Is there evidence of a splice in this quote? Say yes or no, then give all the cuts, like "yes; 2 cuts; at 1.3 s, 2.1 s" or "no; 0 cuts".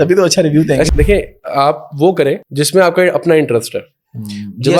yes; 2 cuts; at 0.9 s, 2.5 s